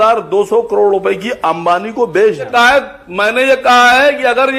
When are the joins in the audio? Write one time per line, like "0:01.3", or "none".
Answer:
0:02.5